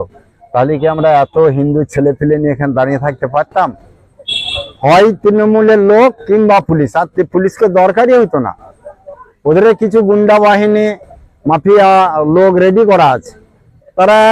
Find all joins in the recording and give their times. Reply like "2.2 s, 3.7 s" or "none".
none

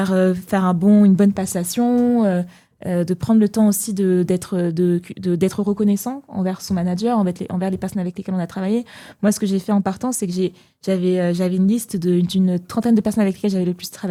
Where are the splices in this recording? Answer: none

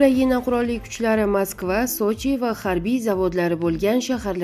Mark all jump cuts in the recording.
none

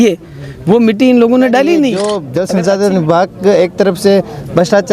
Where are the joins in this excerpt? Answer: 2.0 s

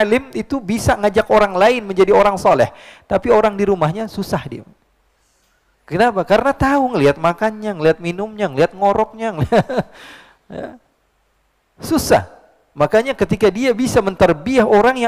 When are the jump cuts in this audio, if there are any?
none

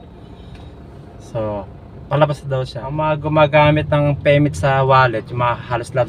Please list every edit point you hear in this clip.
2.8 s

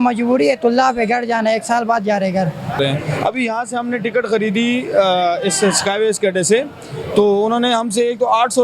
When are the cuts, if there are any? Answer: 2.8 s

